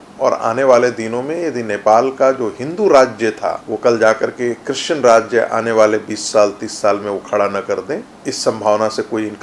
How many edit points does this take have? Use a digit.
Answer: 2